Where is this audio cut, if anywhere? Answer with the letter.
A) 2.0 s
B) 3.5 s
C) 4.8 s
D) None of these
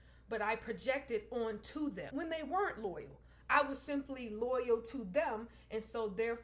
A